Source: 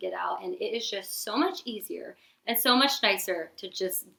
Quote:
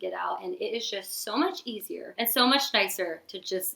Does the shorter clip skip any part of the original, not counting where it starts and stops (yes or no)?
yes